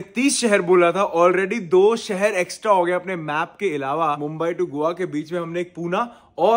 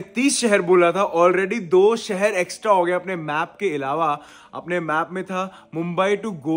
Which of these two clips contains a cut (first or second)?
first